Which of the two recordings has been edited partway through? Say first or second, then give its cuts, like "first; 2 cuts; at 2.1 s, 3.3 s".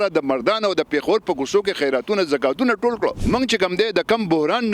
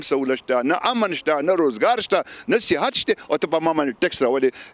first; 1 cut; at 3.2 s